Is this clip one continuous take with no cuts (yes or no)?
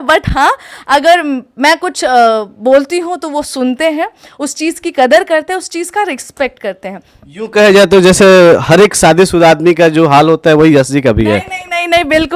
yes